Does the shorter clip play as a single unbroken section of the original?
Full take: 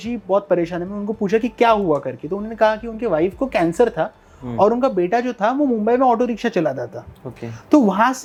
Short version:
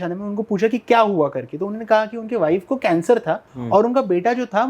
no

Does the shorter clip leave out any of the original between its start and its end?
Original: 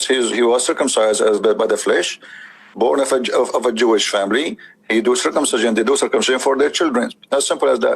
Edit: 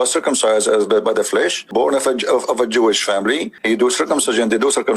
yes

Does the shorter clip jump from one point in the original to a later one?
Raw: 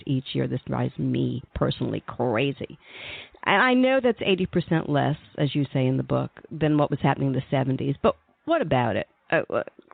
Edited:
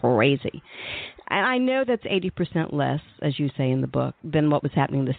yes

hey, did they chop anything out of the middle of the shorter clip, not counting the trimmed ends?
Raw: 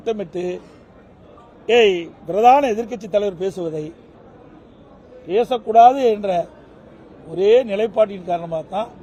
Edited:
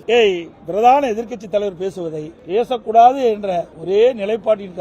yes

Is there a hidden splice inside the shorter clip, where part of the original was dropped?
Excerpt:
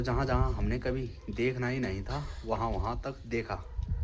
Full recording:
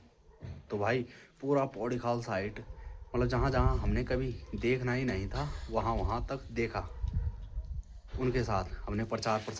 no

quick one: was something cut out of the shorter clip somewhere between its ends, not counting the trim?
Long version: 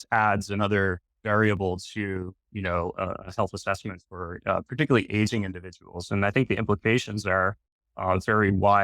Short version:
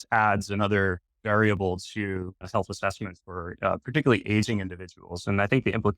yes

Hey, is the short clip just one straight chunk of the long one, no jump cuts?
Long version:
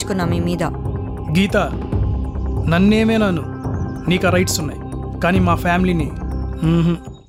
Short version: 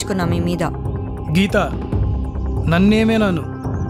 yes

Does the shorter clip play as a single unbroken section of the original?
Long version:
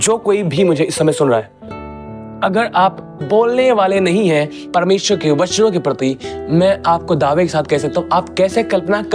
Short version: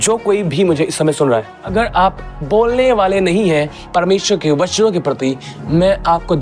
no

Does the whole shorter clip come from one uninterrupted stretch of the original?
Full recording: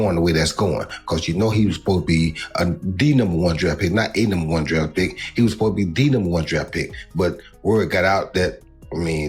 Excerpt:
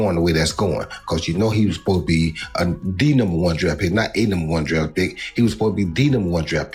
yes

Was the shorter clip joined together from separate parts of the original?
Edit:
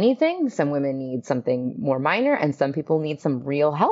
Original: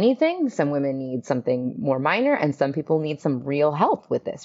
no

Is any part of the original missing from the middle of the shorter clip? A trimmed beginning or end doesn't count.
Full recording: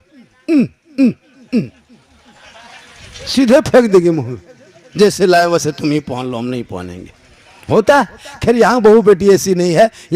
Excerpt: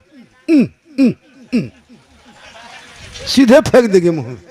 no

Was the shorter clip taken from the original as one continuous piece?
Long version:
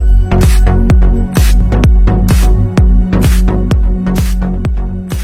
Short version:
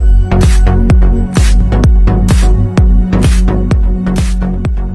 yes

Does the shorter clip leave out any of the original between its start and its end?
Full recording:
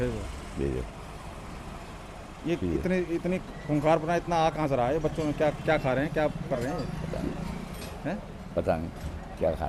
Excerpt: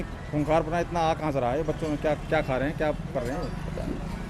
no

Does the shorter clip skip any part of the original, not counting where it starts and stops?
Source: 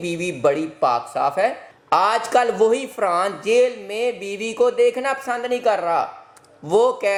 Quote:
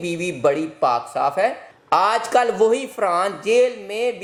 no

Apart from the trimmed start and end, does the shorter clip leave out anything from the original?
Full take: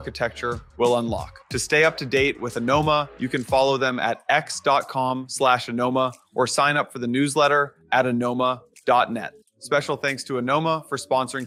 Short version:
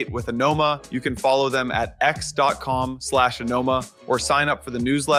no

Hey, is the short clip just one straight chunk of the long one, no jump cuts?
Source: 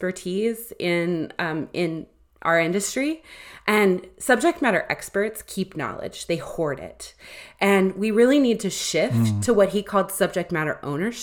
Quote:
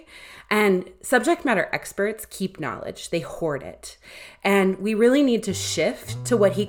yes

